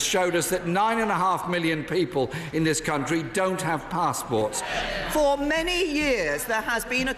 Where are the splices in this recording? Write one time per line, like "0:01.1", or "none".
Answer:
0:04.7

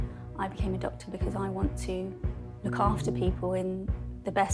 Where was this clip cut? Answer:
none

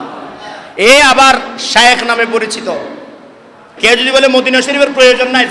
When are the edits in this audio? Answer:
0:03.7

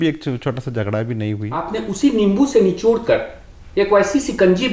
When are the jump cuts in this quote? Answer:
0:01.5

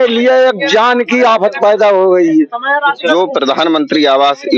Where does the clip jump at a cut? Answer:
0:03.1

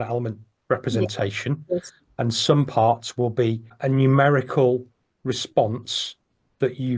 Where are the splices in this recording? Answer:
0:03.7

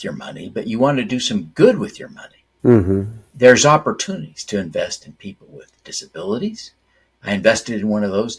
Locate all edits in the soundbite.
none

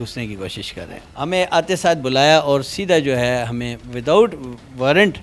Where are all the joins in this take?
0:01.0

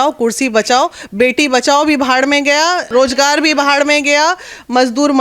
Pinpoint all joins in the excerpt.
0:02.9

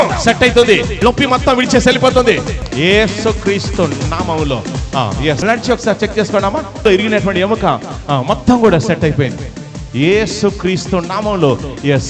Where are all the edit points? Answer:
0:00.9
0:02.5
0:05.4
0:06.8

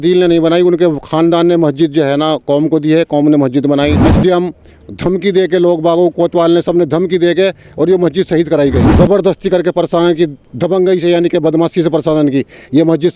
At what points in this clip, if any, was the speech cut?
0:04.1
0:08.9

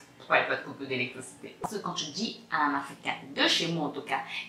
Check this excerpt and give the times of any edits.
0:01.6

